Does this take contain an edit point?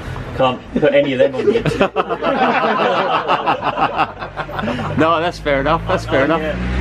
no; 0 cuts

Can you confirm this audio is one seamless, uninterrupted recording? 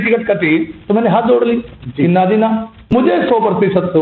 no; 1 cut; at 2.9 s

